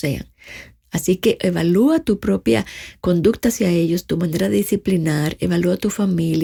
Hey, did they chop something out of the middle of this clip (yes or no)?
no